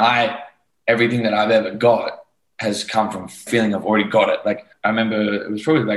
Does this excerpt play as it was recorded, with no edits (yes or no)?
no